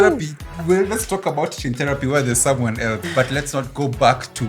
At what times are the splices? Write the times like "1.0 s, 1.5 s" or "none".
3.0 s